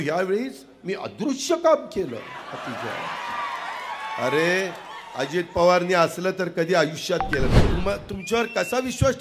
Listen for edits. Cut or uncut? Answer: cut